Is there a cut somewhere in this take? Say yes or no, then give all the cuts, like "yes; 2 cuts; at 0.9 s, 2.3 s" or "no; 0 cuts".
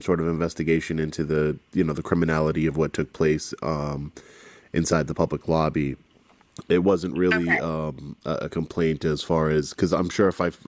no; 0 cuts